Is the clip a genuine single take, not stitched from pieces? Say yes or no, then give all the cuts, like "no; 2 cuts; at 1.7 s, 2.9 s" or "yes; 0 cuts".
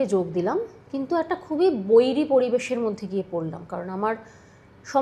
yes; 0 cuts